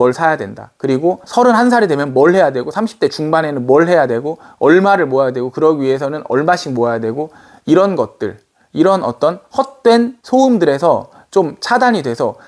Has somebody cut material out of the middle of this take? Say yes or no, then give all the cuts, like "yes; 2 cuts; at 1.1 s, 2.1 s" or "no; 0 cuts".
yes; 1 cut; at 1.3 s